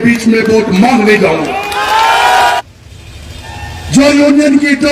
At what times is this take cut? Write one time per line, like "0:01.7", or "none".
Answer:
0:02.6